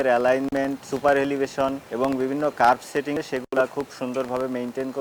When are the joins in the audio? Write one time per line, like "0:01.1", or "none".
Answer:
0:00.9
0:01.8
0:03.1